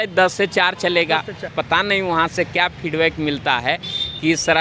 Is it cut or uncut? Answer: cut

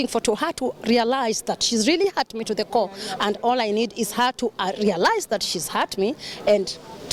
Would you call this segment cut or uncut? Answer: uncut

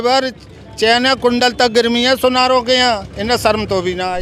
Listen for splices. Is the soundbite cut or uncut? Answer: uncut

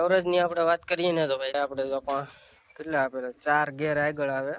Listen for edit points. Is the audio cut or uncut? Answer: cut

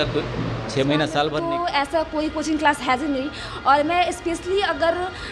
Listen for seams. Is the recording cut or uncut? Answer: cut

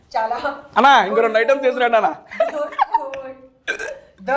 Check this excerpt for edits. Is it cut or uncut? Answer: uncut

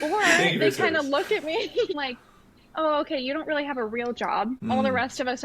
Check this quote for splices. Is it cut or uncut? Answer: cut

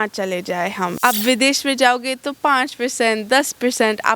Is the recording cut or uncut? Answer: cut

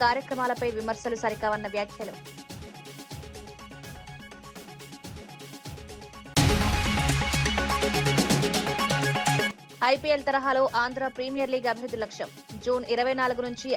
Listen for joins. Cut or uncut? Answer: uncut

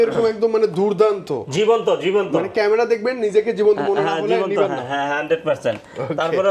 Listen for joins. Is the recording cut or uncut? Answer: uncut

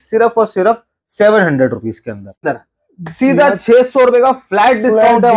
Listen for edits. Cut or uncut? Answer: cut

